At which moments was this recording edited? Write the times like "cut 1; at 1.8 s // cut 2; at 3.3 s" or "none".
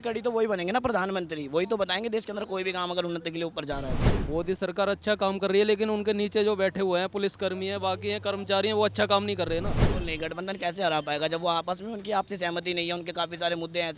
cut 1; at 4.1 s // cut 2; at 9.9 s